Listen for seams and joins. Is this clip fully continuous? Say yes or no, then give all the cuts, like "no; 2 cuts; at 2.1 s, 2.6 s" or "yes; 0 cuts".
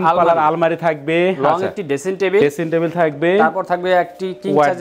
yes; 0 cuts